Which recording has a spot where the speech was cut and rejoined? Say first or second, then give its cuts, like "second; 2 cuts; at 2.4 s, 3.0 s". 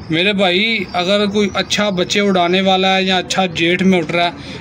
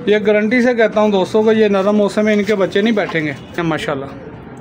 second; 1 cut; at 3.6 s